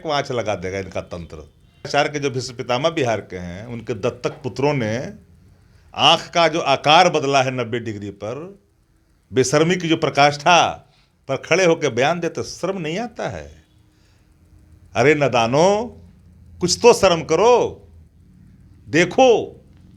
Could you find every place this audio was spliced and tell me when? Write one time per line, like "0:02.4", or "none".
0:01.9